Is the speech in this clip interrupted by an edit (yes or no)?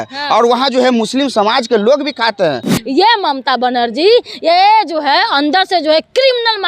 yes